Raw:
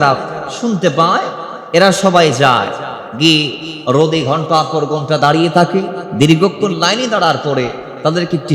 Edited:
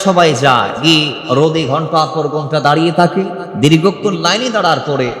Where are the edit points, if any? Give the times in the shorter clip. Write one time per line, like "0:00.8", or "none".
0:01.0